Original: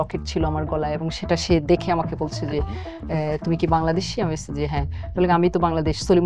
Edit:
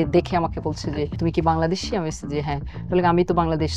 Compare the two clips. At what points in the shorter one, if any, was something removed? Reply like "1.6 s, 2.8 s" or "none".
1.1 s